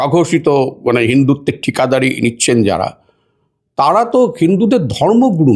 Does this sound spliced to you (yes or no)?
no